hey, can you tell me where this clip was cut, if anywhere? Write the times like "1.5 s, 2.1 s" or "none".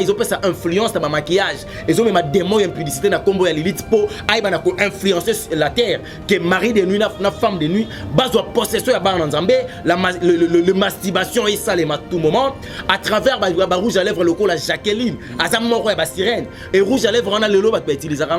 none